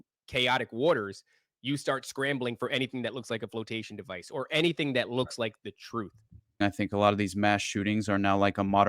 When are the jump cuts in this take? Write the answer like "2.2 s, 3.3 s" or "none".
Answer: 6.6 s